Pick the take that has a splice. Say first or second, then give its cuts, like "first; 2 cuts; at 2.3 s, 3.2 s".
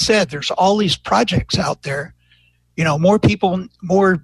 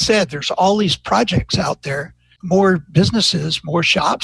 second; 1 cut; at 2.3 s